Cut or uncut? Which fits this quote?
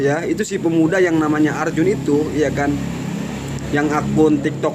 uncut